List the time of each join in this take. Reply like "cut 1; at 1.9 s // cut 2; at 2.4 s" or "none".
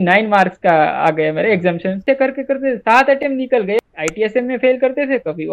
cut 1; at 2.0 s // cut 2; at 3.8 s

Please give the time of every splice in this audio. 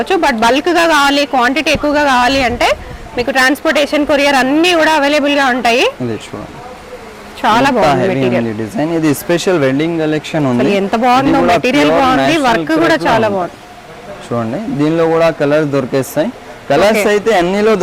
none

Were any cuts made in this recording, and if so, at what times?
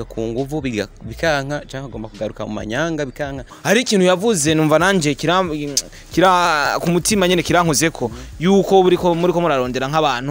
cut 1; at 3.6 s

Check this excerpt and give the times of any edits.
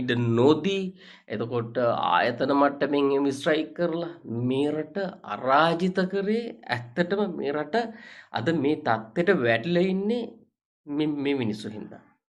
none

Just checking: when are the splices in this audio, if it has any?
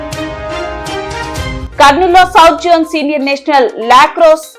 cut 1; at 1.6 s

